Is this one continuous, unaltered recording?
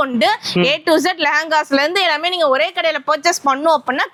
yes; 0 cuts

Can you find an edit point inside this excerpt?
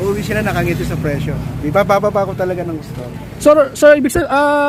no; 0 cuts

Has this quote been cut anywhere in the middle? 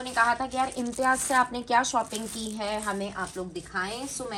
no; 0 cuts

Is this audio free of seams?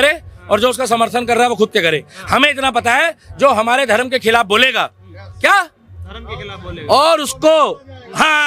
yes; 0 cuts

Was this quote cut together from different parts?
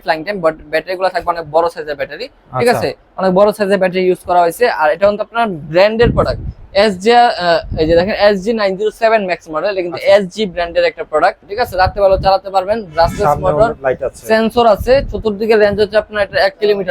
yes; 1 cut; at 11.5 s

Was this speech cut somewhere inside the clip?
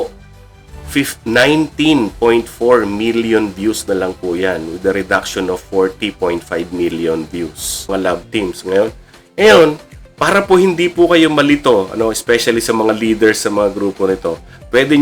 yes; 1 cut; at 7.9 s

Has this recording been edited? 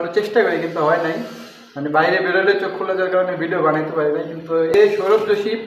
yes; 1 cut; at 4.7 s

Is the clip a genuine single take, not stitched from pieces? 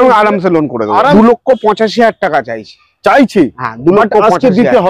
no; 1 cut; at 1.1 s

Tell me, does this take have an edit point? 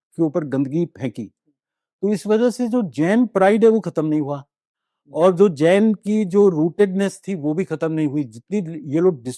no; 0 cuts

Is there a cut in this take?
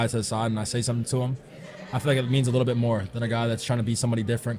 no; 0 cuts

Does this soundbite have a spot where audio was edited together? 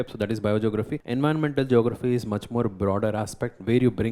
yes; 1 cut; at 1.0 s

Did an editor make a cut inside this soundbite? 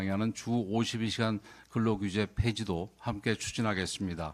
no; 0 cuts

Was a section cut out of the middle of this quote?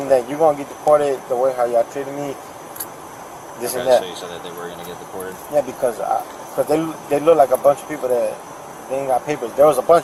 no; 0 cuts

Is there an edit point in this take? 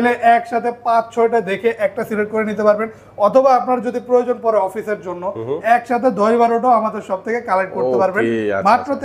no; 0 cuts

